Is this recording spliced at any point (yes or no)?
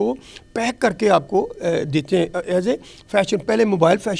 no